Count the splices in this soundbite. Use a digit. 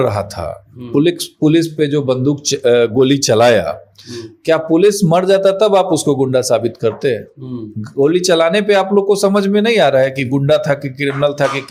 0